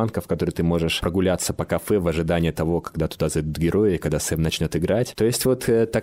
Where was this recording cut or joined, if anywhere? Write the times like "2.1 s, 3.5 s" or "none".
none